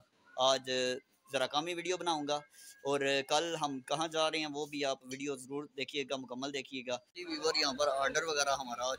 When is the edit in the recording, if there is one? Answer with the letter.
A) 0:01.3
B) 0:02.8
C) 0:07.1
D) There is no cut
C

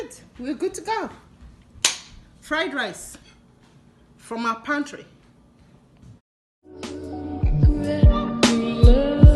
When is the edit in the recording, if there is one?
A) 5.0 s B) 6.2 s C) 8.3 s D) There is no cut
B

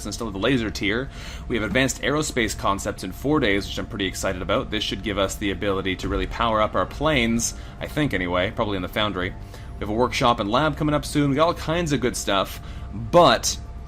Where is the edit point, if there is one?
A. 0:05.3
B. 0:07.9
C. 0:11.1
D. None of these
B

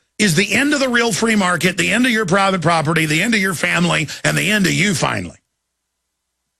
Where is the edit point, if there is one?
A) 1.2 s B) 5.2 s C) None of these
B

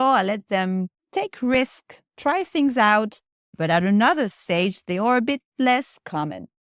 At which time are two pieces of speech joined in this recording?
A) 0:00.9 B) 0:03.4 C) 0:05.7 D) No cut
B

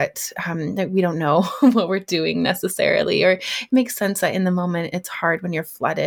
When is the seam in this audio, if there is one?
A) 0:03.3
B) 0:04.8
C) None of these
C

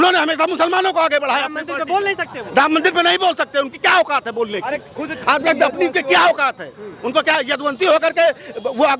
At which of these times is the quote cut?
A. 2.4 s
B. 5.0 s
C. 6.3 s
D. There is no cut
D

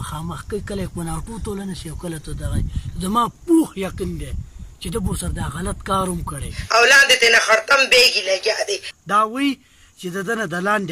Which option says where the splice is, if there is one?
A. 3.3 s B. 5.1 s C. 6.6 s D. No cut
C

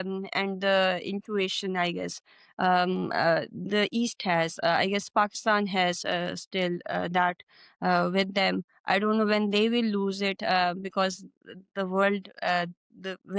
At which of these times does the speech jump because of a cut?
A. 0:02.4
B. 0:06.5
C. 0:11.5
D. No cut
D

